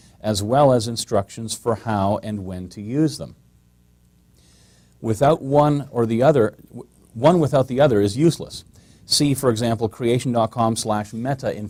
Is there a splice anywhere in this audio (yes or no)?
no